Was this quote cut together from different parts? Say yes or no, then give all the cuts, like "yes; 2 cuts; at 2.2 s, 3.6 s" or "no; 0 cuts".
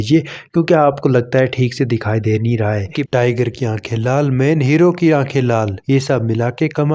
yes; 1 cut; at 3.0 s